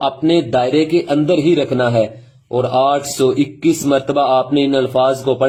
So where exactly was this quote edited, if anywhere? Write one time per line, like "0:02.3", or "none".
none